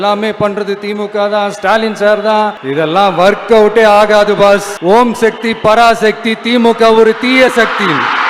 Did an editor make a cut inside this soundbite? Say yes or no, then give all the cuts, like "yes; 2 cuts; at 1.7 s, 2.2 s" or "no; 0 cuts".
yes; 2 cuts; at 2.6 s, 4.7 s